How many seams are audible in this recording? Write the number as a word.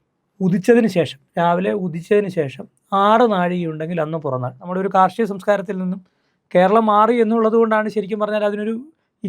one